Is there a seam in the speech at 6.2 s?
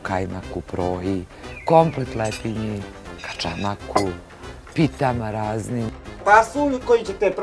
yes; 1 cut; at 6.2 s

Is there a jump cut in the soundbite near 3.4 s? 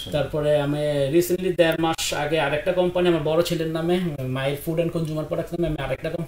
no; 0 cuts

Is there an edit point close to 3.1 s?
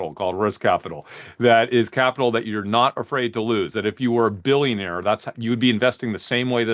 no; 0 cuts

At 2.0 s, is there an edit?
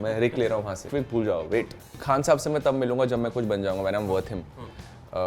yes; 2 cuts; at 0.9 s, 2.0 s

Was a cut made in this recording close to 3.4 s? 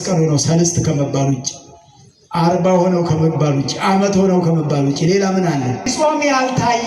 no; 1 cut; at 5.9 s

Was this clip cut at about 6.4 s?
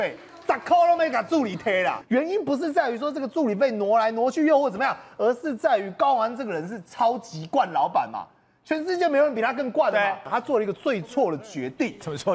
no; 2 cuts; at 2.0 s, 10.3 s

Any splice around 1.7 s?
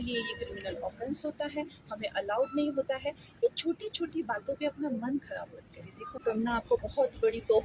no; 1 cut; at 6.2 s

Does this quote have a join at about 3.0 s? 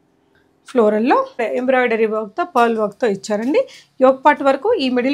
no; 1 cut; at 1.4 s

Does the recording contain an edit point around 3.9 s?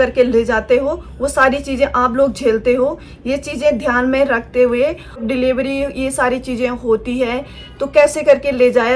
no; 1 cut; at 5.3 s

